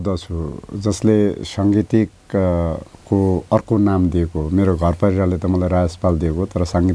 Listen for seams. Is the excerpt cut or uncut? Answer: uncut